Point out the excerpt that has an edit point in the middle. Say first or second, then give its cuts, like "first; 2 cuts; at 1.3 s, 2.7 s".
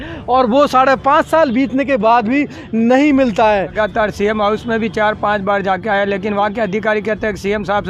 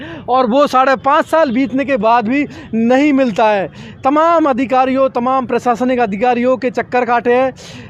first; 1 cut; at 3.7 s